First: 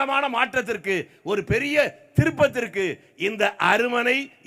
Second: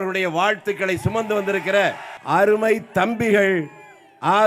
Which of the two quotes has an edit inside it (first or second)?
second